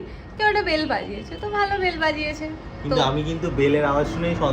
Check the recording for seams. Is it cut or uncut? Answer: uncut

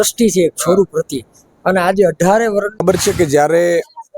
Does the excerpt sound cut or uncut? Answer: cut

